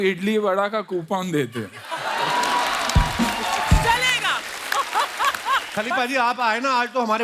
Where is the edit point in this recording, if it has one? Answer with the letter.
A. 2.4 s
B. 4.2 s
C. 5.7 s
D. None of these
C